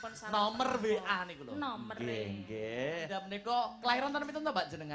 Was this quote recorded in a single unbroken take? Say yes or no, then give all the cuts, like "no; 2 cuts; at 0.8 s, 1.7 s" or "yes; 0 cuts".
no; 1 cut; at 3.2 s